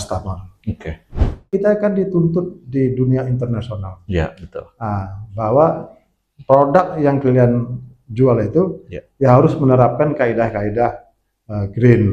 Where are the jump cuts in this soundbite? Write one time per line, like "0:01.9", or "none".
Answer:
0:01.5